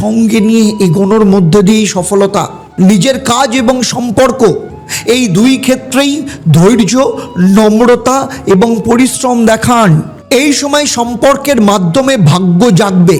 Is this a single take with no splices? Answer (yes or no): no